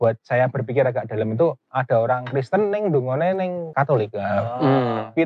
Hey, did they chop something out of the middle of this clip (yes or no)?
yes